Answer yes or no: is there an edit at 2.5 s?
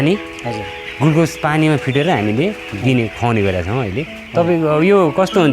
no